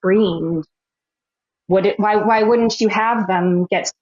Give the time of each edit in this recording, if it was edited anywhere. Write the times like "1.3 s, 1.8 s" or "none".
none